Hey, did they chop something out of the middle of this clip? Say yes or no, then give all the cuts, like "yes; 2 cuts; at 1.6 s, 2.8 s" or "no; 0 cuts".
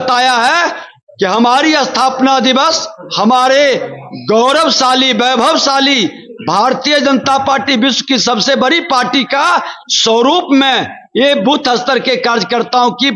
no; 0 cuts